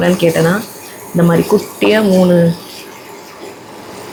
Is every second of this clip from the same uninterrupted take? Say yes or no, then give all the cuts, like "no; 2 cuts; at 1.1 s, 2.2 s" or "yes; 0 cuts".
yes; 0 cuts